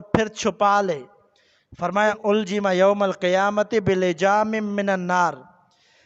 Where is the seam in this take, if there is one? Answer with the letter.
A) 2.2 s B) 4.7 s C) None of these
A